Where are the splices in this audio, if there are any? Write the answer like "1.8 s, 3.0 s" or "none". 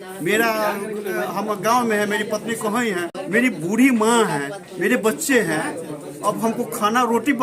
3.1 s